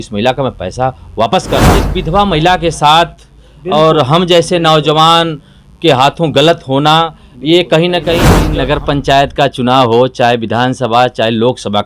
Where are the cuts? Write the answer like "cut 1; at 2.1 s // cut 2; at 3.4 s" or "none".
cut 1; at 1.9 s // cut 2; at 8.4 s